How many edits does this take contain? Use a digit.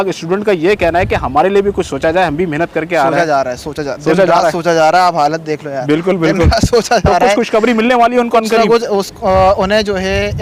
0